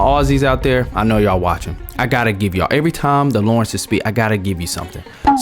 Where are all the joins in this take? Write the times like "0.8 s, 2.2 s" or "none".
none